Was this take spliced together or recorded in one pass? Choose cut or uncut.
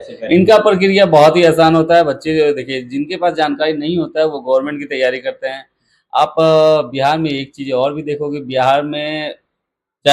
uncut